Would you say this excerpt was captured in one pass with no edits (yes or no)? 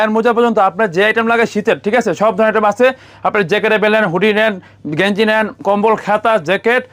yes